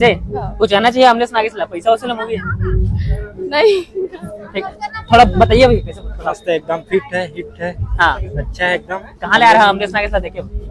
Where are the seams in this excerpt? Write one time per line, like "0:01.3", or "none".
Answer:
none